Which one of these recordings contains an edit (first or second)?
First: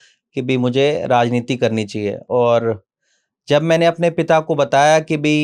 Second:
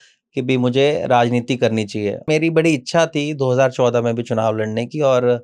second